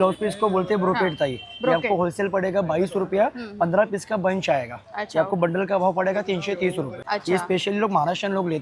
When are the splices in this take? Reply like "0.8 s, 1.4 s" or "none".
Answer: 7.0 s